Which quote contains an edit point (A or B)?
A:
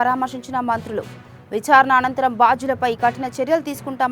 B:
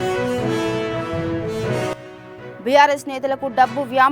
B